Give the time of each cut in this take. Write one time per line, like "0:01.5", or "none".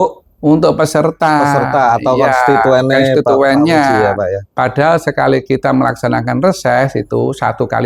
none